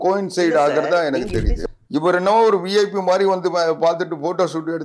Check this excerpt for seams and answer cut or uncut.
cut